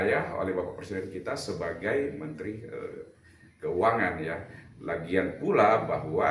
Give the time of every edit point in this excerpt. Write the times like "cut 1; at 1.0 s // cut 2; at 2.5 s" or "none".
none